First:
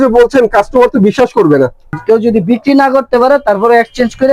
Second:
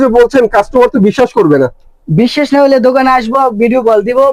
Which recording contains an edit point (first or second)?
first